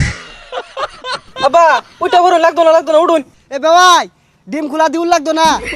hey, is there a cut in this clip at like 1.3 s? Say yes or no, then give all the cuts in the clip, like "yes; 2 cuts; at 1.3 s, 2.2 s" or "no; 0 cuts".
yes; 2 cuts; at 1.3 s, 3.4 s